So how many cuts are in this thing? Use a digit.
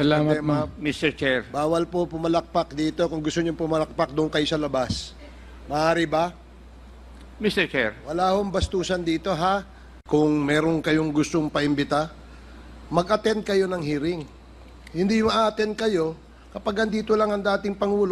1